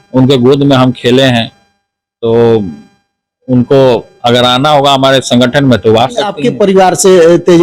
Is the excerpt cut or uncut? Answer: cut